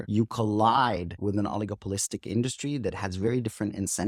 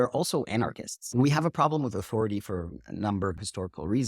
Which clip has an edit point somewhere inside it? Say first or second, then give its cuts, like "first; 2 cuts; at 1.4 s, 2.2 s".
second; 2 cuts; at 1.0 s, 3.4 s